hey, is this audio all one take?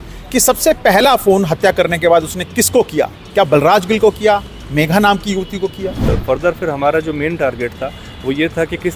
no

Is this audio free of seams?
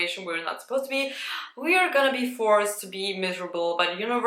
yes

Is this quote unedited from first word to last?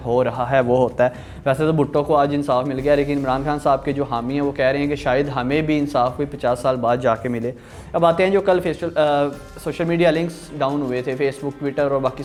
yes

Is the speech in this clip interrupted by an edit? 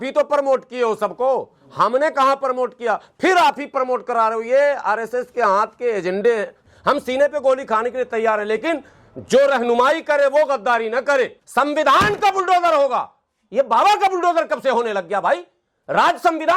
yes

